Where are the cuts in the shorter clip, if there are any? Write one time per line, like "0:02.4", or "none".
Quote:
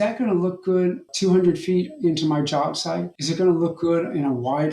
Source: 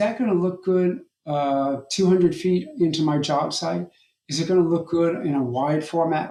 0:01.1
0:03.2

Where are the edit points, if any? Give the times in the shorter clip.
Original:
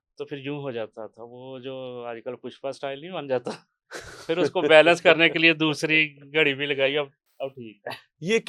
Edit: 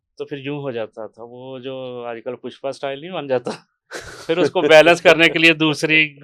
none

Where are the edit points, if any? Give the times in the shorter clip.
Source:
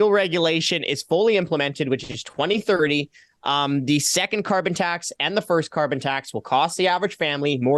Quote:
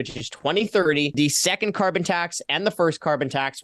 0:01.1

